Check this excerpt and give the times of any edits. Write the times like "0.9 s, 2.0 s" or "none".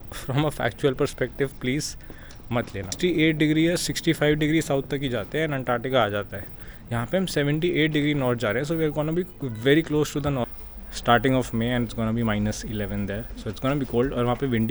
2.9 s, 10.5 s